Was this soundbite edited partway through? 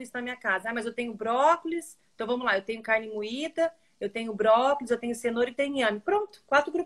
no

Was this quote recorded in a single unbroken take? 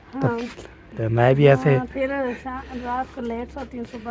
no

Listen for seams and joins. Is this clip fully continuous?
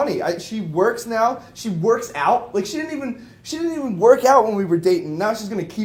yes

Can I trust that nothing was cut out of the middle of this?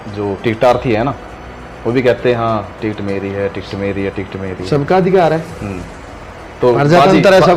yes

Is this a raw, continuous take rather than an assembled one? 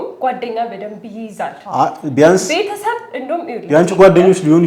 yes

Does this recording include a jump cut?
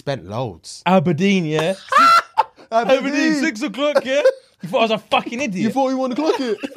no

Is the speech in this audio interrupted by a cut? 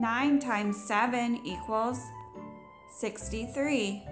no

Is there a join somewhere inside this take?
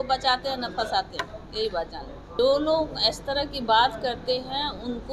yes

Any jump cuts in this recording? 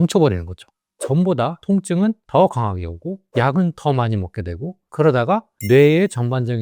yes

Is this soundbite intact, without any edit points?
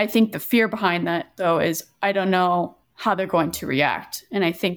yes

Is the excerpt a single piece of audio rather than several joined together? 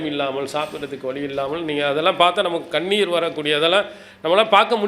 yes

